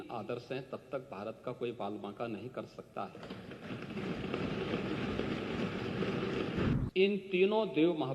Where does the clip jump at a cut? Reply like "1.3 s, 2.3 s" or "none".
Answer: 6.7 s